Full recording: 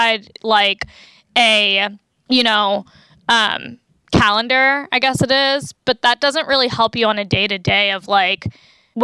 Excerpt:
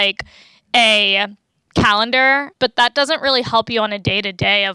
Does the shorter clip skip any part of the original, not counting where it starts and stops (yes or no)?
yes